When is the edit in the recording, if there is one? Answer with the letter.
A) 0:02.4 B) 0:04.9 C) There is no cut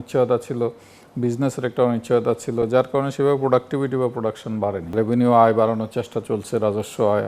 B